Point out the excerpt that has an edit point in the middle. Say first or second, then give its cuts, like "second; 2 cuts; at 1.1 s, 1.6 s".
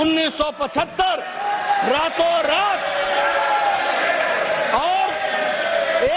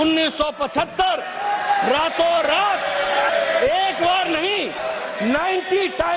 second; 1 cut; at 3.3 s